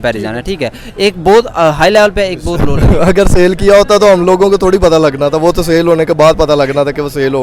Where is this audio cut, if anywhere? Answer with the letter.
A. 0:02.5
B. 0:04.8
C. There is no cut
A